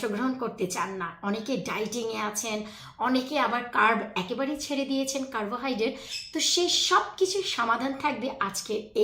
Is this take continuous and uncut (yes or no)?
yes